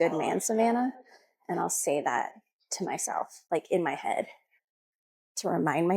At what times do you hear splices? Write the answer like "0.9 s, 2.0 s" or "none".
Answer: 3.4 s

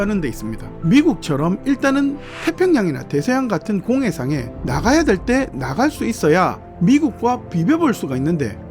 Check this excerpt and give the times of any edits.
6.7 s

